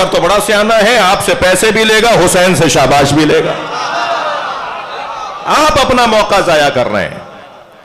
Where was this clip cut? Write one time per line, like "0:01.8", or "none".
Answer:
none

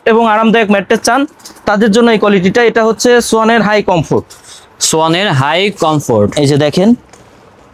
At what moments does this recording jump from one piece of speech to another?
none

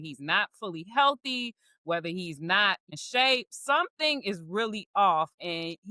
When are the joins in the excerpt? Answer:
0:02.9

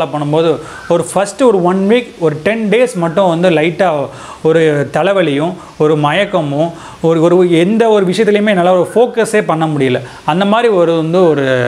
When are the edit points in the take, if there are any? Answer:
none

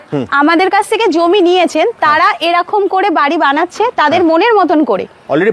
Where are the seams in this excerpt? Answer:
none

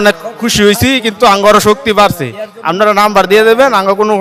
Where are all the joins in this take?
none

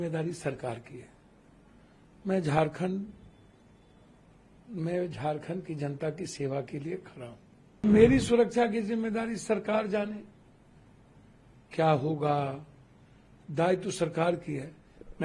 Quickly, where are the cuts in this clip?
0:07.8

